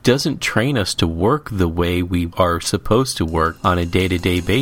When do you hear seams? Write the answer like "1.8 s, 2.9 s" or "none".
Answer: 2.3 s, 3.6 s